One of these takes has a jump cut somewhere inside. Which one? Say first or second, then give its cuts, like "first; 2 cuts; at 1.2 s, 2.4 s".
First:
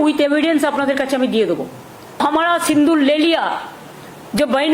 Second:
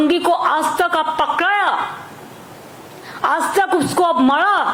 first; 1 cut; at 2.4 s